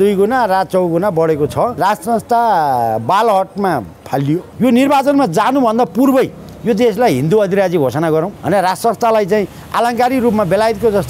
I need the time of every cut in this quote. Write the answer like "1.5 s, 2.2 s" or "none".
1.8 s, 4.5 s, 8.4 s